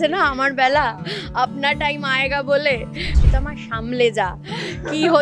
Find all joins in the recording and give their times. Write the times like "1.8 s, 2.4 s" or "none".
3.2 s